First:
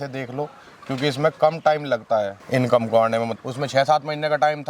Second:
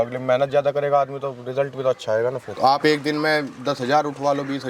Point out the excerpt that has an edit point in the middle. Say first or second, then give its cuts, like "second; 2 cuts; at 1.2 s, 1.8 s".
second; 1 cut; at 2.5 s